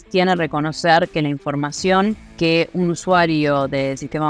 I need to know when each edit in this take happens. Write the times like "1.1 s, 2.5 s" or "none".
2.3 s